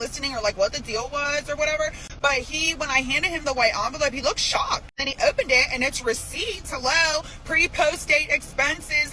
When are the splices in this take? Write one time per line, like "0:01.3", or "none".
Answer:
0:02.0
0:05.0